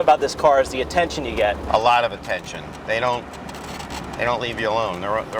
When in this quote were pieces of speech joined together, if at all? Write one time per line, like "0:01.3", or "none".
none